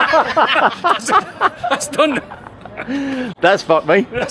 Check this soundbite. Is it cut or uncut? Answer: uncut